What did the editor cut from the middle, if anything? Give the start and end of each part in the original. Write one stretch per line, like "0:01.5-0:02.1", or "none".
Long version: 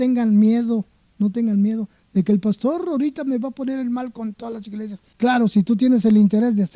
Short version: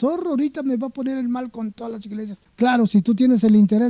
none